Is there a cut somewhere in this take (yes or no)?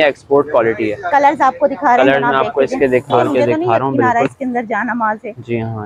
yes